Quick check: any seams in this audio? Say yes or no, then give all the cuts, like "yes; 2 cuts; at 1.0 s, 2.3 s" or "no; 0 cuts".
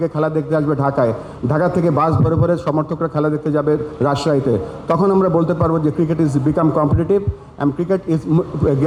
no; 0 cuts